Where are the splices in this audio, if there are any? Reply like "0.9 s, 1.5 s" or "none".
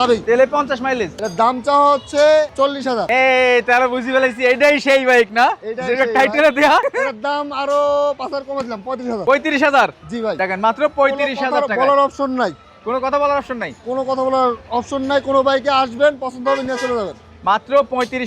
none